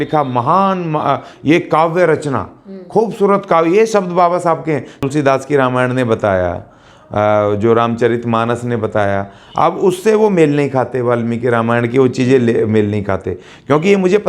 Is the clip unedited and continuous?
no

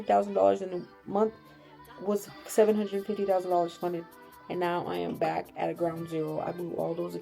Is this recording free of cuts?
yes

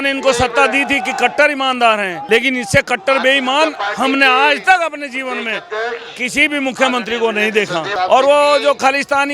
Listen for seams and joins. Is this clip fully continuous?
no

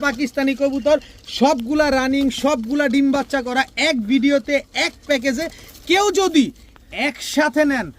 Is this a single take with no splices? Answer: yes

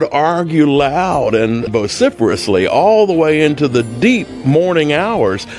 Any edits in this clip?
yes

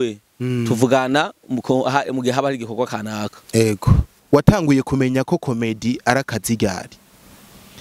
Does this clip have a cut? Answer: yes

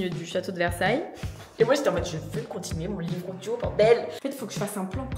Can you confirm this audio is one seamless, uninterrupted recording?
no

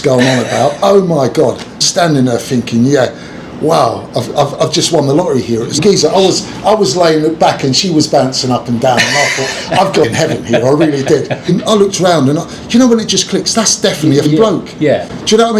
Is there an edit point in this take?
yes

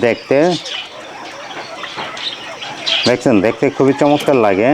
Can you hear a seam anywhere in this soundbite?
no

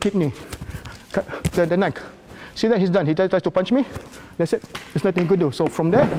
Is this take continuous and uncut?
yes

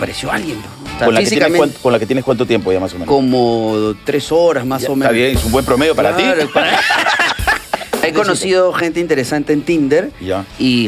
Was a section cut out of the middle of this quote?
yes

